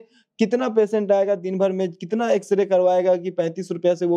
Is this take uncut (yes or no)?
yes